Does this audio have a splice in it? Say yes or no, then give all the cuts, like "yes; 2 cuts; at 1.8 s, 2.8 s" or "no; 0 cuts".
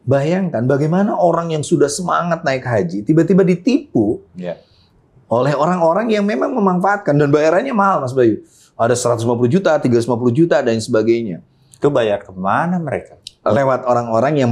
no; 0 cuts